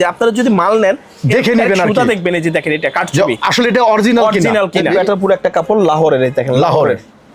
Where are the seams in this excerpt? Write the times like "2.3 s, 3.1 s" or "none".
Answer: 4.9 s